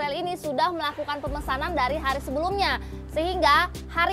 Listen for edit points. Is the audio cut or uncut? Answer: uncut